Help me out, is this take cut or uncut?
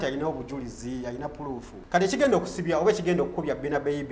cut